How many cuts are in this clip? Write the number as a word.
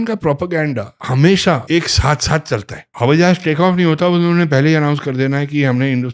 three